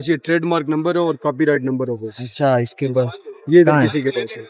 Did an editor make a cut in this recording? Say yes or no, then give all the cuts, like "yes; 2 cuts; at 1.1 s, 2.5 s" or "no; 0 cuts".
no; 0 cuts